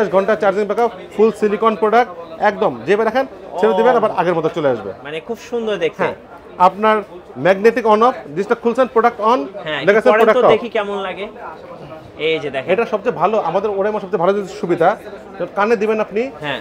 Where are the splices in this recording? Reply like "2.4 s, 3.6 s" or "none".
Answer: none